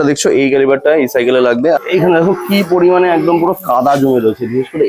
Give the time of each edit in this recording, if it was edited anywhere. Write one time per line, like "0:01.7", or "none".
0:01.8